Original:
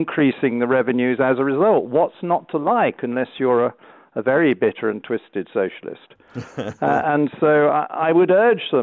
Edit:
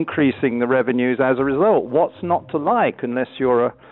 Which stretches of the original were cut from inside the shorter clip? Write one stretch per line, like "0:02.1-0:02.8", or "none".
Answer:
none